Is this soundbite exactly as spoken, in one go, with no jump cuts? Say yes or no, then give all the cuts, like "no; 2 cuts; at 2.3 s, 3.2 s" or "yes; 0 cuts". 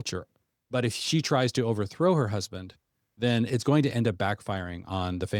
yes; 0 cuts